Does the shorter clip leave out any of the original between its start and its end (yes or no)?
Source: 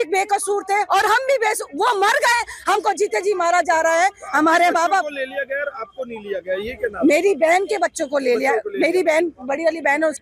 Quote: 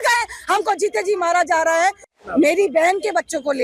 yes